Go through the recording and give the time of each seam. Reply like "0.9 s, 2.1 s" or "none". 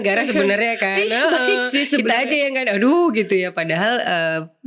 none